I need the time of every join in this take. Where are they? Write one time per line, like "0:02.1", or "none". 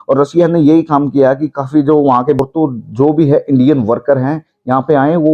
0:02.4